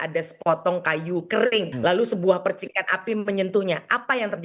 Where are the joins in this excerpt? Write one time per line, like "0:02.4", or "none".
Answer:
0:01.7

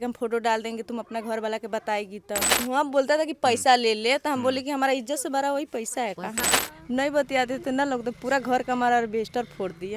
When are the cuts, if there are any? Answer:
0:02.5
0:06.5

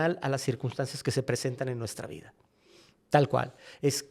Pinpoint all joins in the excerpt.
none

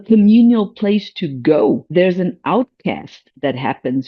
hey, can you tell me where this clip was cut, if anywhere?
0:01.9

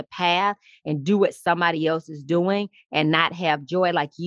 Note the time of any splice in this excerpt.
none

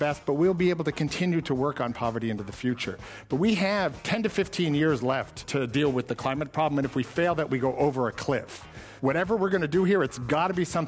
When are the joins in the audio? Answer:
0:04.0
0:05.4
0:08.8

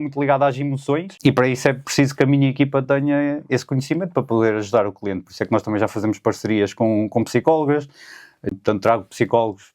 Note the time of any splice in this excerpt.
0:01.1
0:08.5

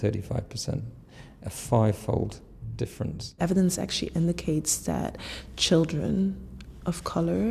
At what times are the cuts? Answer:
0:03.4

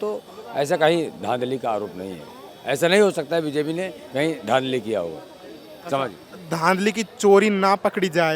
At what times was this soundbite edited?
none

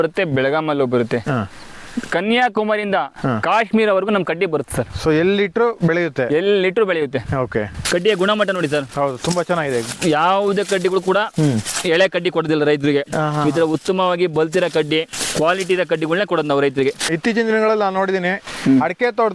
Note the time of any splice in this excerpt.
0:07.8
0:17.0

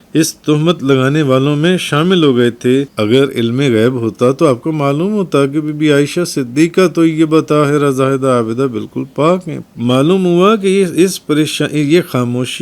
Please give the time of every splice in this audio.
0:02.9
0:09.6

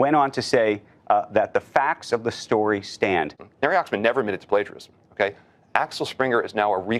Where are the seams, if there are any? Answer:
0:03.4

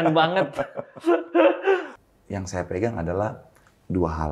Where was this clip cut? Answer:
0:01.9

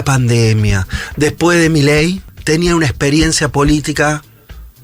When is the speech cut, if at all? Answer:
0:02.3

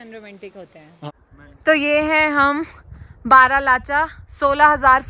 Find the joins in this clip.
0:01.1

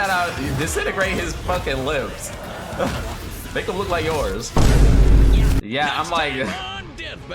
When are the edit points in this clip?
0:05.6

